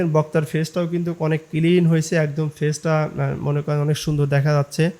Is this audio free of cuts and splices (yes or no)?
yes